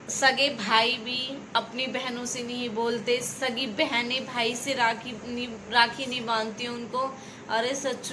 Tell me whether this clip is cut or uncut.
uncut